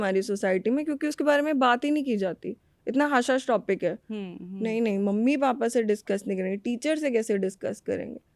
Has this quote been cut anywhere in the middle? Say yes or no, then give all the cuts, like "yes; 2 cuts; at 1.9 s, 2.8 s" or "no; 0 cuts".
no; 0 cuts